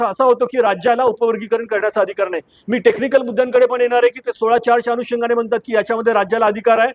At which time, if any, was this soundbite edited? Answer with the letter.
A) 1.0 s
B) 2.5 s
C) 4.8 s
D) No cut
D